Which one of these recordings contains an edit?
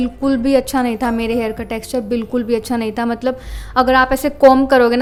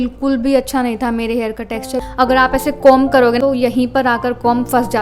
second; 2 cuts; at 2.0 s, 3.4 s

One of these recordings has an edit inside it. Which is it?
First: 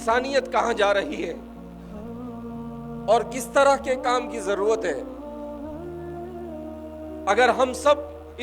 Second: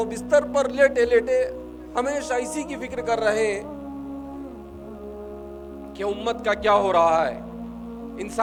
first; 4 cuts; at 1.4 s, 2.8 s, 5.0 s, 7.2 s

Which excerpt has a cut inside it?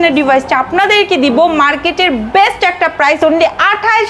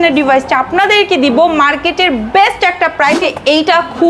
second; 1 cut; at 3.2 s

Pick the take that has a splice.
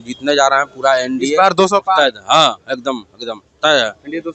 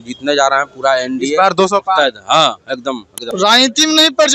second; 1 cut; at 3.1 s

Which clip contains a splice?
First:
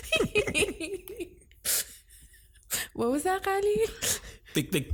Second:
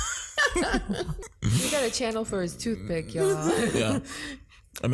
second; 1 cut; at 1.2 s

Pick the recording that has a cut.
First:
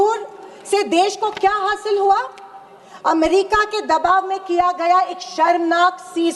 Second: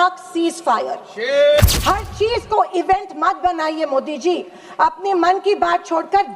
second; 1 cut; at 1.6 s

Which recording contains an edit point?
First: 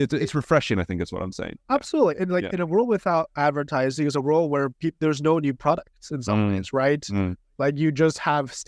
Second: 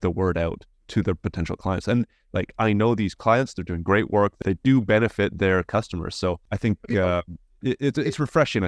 second; 2 cuts; at 4.4 s, 6.5 s

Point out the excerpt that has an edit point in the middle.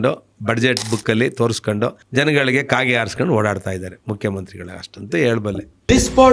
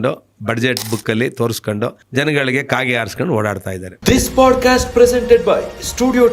second; 1 cut; at 3.9 s

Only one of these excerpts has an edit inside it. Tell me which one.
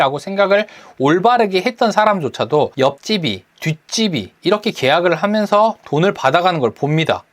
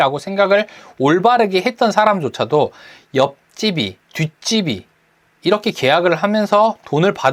first; 2 cuts; at 2.9 s, 4.3 s

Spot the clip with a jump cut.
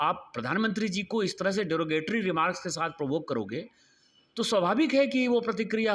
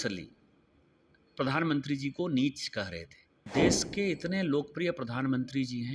second; 1 cut; at 3.5 s

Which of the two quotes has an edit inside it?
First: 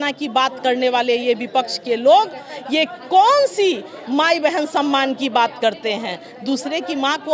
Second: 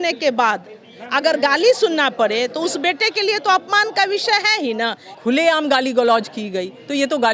second; 1 cut; at 5.1 s

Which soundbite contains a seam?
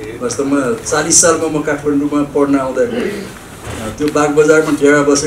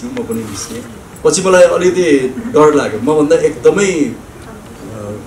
second; 1 cut; at 1.1 s

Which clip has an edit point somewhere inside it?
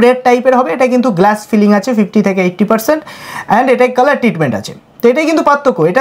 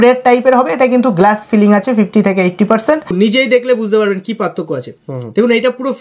second; 1 cut; at 3.1 s

